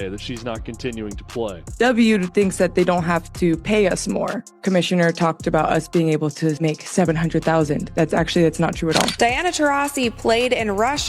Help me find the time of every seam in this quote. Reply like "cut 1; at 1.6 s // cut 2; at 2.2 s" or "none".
cut 1; at 1.6 s // cut 2; at 4.6 s // cut 3; at 9.1 s